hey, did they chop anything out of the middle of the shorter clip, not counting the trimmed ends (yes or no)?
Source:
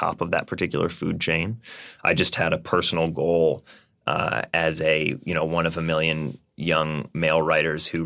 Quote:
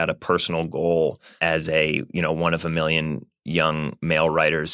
yes